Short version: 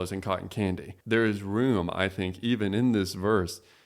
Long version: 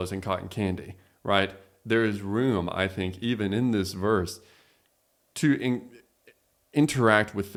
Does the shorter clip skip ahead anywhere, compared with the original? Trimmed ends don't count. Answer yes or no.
yes